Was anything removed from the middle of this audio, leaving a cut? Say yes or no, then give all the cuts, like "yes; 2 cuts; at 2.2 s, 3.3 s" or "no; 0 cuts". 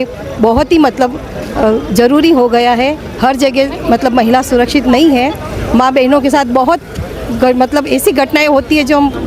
no; 0 cuts